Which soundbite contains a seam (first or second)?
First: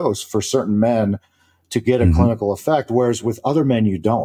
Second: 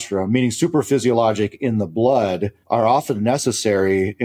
second